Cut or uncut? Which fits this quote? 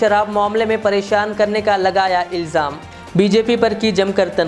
uncut